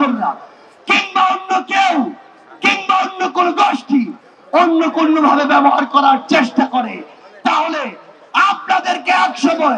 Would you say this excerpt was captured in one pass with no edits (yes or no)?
yes